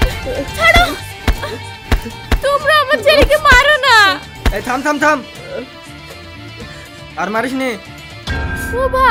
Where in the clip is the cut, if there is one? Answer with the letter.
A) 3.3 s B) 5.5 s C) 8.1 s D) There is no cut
D